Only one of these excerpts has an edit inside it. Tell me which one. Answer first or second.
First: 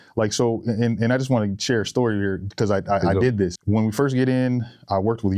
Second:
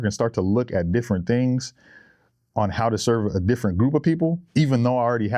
first